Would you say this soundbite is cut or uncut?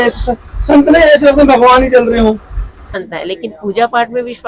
cut